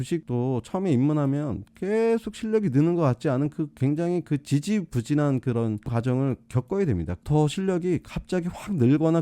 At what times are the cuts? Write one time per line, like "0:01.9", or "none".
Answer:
0:07.1